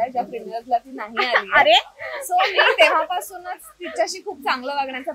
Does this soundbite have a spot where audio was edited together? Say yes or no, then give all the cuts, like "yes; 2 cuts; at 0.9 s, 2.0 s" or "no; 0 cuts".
no; 0 cuts